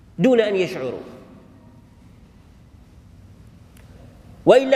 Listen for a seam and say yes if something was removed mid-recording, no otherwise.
no